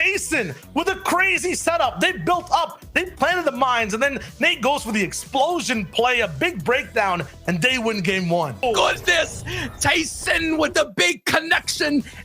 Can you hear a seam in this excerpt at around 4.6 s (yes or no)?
no